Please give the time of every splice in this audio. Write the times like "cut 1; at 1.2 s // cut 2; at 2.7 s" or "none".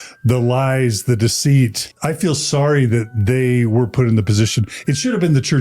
cut 1; at 1.9 s